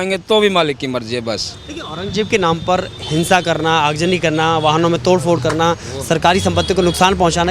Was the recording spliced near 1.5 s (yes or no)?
no